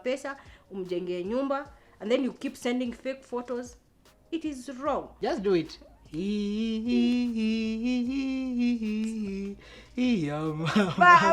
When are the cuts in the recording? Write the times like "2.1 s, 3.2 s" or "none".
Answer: 5.1 s

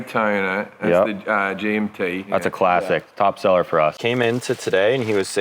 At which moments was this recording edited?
4.0 s

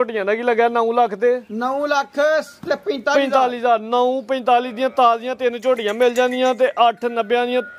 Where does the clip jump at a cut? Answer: none

